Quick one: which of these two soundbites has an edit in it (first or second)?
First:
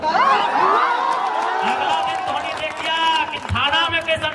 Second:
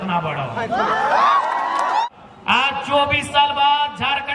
second